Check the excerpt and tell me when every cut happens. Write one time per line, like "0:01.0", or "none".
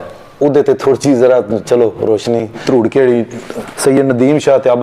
0:02.6